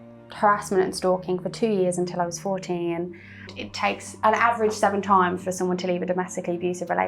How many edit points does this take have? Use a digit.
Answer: 1